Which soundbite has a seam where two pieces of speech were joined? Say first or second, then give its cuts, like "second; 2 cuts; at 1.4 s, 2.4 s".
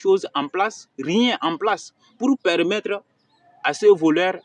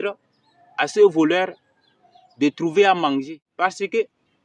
second; 1 cut; at 3.5 s